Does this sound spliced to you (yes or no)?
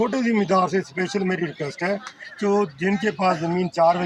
no